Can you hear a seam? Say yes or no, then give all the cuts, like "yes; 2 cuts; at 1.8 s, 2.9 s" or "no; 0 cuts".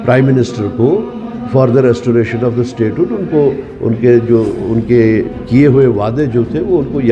no; 0 cuts